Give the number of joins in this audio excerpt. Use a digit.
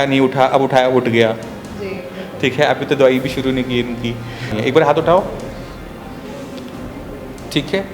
1